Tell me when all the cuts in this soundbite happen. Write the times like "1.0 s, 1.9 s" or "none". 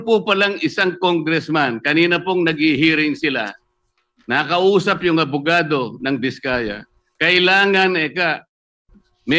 none